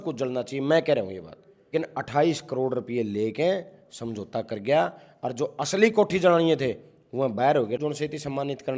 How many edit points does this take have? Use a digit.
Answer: 2